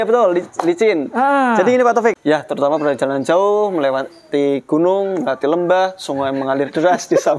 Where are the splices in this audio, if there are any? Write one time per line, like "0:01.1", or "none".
0:02.2